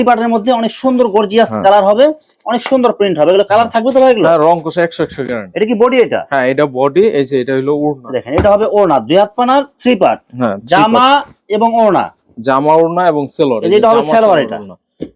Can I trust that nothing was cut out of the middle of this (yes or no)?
yes